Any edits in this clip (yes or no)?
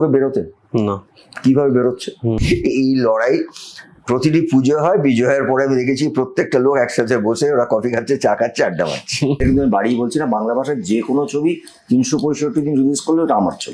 yes